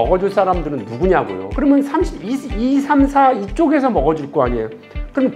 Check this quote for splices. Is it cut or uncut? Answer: cut